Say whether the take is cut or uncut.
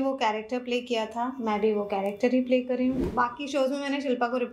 cut